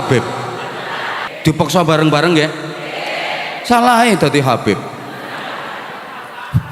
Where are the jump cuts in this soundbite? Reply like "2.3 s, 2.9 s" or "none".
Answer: 1.2 s